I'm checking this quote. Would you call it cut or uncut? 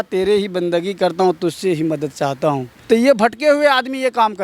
cut